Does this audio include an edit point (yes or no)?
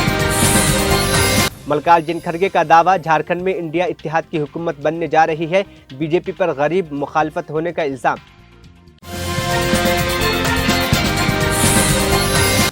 yes